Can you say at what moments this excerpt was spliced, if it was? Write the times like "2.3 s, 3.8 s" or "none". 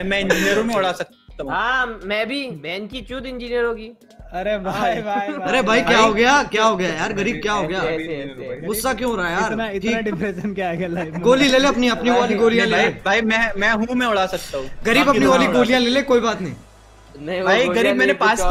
none